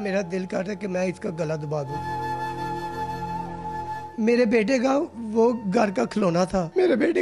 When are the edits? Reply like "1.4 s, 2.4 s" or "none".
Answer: none